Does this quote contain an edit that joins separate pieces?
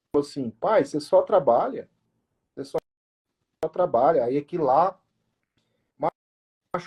no; 0 cuts

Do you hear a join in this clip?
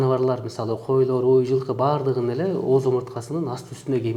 no; 0 cuts

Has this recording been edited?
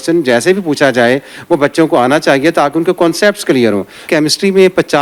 yes; 1 cut; at 4.1 s

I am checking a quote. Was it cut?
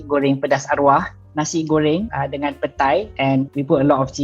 no; 0 cuts

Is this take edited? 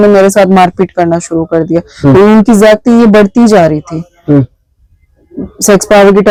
no; 0 cuts

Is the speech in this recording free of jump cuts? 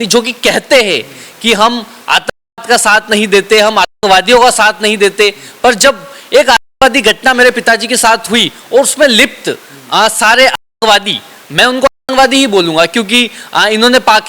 yes; 0 cuts

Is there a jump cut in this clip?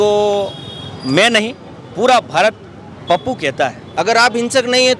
yes; 1 cut; at 3.8 s

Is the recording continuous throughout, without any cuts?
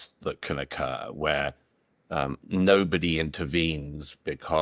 yes; 0 cuts

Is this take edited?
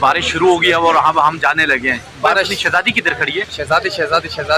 no; 0 cuts

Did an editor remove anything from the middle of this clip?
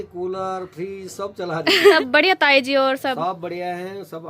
yes; 1 cut; at 1.9 s

